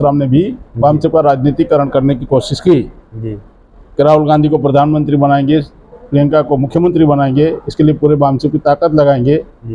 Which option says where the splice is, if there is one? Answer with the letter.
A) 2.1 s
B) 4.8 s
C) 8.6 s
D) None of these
D